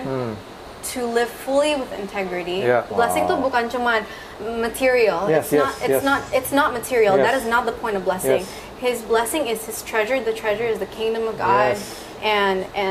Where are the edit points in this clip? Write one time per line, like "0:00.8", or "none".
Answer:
0:02.9